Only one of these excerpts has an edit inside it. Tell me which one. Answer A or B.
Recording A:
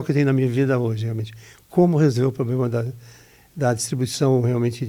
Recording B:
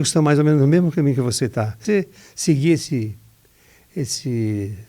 B